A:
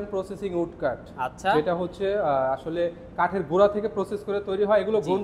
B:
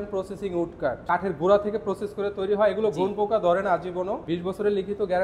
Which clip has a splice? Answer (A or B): B